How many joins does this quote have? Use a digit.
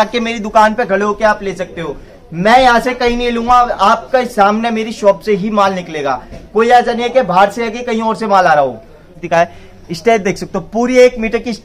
1